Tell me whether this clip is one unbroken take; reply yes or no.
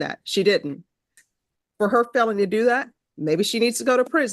no